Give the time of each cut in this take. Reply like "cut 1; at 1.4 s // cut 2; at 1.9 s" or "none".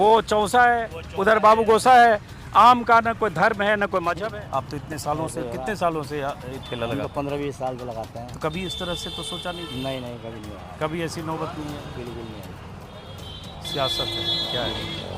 cut 1; at 4.2 s